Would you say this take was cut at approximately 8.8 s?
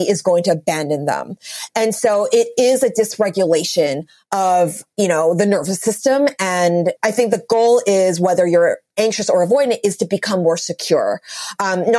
no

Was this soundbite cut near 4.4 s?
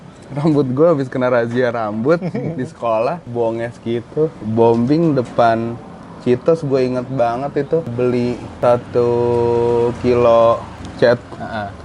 yes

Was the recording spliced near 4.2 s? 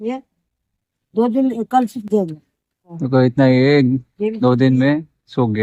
no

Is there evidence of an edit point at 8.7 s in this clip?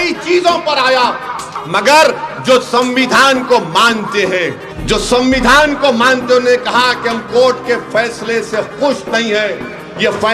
no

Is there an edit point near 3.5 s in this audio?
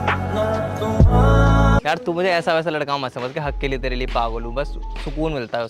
no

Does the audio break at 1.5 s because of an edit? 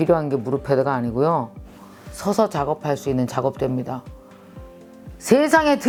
no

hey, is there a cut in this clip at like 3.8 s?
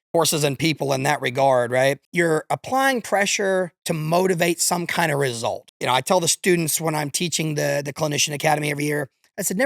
no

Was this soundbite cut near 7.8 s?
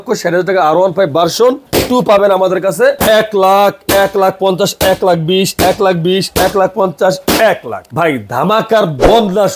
yes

